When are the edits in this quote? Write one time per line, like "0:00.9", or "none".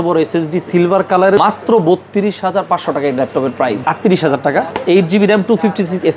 0:01.4
0:03.8
0:04.7